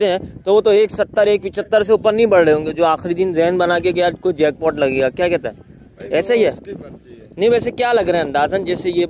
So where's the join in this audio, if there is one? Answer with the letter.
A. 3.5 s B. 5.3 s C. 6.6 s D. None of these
D